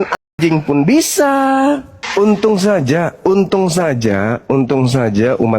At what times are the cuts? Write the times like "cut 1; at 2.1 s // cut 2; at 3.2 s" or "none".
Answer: cut 1; at 2.0 s